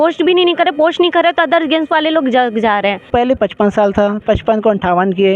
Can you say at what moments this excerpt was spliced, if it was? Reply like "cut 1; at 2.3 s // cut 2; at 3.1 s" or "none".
cut 1; at 3.1 s